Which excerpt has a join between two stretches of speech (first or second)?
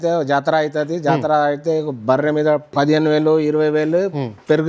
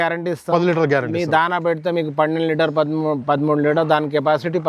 first